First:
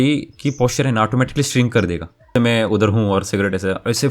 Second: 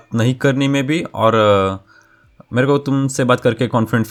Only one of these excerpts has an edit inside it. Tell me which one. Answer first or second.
first